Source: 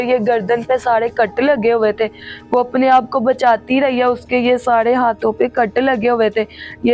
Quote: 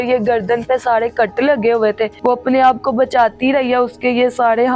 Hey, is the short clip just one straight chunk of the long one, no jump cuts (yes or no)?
no